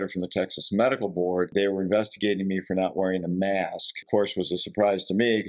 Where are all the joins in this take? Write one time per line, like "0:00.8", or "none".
0:01.5
0:04.0